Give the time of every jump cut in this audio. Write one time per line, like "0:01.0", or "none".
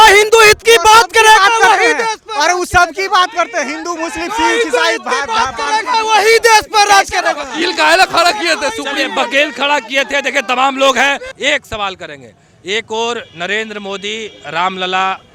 none

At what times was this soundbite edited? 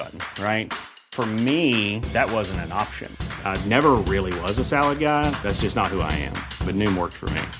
none

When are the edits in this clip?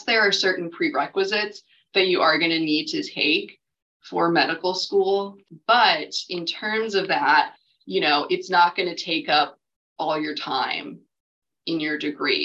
none

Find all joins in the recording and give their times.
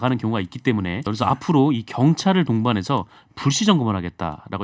0:01.1

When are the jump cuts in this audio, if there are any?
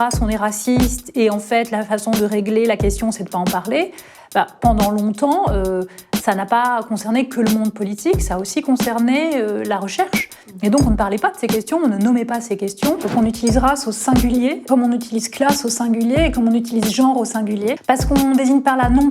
0:13.1
0:14.6
0:17.8

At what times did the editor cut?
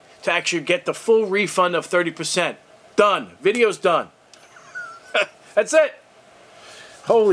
none

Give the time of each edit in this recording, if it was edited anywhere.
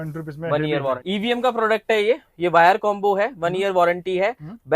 0:01.0

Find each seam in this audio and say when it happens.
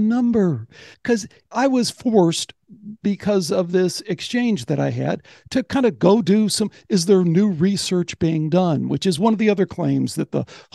0:01.0

